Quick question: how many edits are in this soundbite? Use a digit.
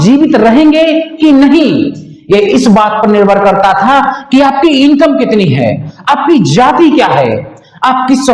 0